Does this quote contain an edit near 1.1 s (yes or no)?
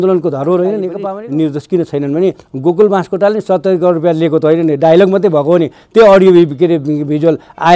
yes